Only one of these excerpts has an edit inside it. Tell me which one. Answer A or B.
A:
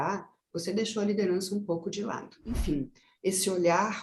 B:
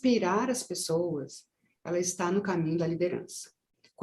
A